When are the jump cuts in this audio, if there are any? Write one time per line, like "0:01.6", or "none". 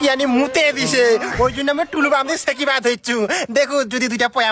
none